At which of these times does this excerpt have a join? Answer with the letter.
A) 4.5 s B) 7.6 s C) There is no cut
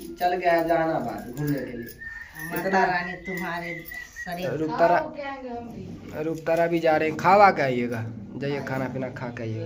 A